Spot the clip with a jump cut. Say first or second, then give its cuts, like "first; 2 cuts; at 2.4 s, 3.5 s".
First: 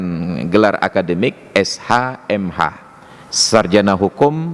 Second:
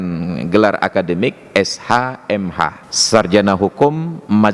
second; 1 cut; at 2.9 s